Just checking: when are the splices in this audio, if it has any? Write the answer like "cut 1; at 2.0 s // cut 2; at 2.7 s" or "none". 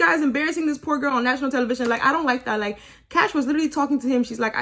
none